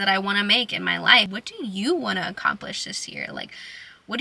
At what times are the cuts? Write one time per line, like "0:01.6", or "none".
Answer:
0:01.3